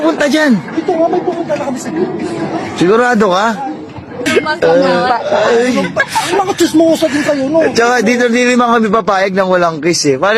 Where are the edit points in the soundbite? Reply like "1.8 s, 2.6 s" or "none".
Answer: 4.2 s